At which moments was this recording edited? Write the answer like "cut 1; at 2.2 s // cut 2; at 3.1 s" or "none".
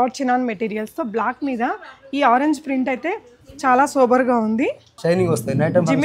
cut 1; at 4.9 s